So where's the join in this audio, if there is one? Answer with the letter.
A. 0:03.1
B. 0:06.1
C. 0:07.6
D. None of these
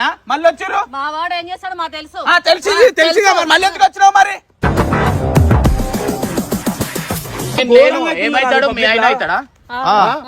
C